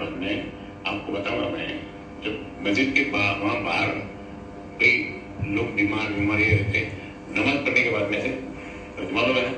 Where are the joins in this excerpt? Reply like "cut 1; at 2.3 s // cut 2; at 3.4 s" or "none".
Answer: none